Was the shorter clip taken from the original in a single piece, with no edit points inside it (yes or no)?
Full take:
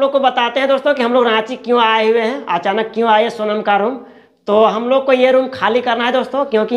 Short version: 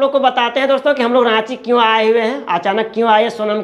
yes